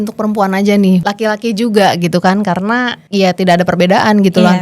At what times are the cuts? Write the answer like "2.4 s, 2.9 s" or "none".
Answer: 1.0 s, 3.0 s